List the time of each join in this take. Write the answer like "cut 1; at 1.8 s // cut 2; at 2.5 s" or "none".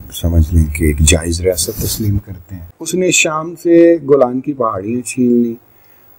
cut 1; at 2.9 s